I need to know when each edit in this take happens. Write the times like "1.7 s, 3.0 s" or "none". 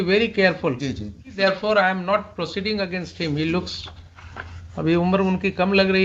1.3 s